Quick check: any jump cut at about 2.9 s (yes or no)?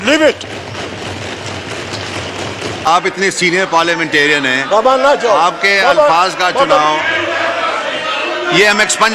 yes